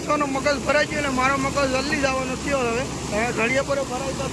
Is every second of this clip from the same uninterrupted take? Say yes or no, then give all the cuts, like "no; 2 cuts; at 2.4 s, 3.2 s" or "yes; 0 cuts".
yes; 0 cuts